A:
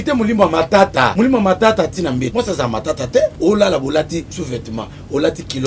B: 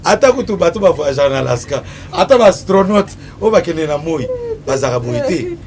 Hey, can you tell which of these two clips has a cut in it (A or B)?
A